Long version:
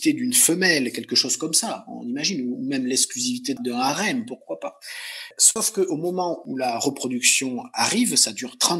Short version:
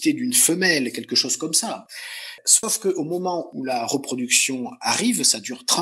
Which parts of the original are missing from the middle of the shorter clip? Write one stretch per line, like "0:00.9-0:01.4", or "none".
0:01.9-0:04.8

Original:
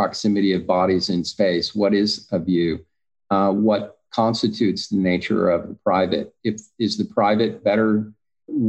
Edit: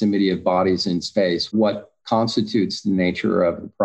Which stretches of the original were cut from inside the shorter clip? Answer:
0:01.8-0:03.6

